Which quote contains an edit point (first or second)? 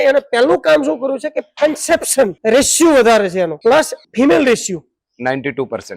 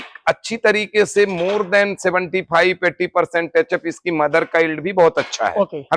first